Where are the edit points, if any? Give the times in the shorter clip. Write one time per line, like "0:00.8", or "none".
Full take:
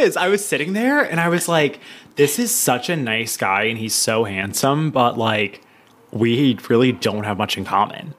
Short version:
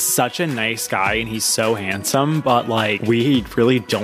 0:03.0